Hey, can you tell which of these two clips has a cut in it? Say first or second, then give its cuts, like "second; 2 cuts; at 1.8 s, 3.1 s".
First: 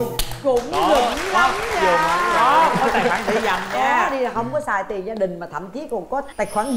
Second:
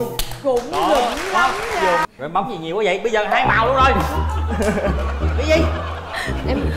second; 1 cut; at 2.0 s